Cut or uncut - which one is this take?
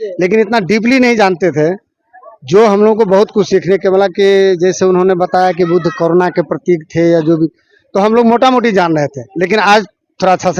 uncut